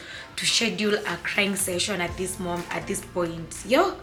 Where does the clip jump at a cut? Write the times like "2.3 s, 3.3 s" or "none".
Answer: none